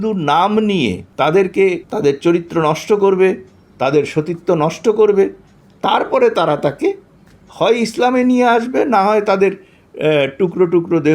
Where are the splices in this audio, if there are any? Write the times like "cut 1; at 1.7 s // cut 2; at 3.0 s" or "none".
cut 1; at 1.0 s // cut 2; at 1.9 s